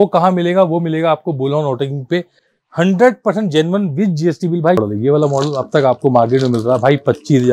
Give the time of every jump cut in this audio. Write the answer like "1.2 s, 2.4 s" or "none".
4.8 s